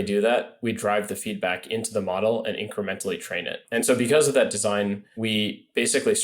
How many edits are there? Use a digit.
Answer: 2